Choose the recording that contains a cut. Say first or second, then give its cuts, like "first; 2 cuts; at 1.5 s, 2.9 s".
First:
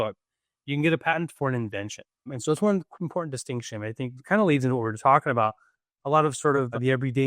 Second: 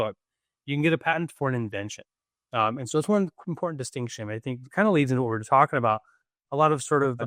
first; 1 cut; at 2.3 s